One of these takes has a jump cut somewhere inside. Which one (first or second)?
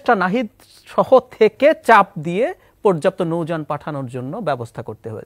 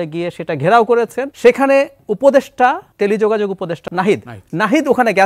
second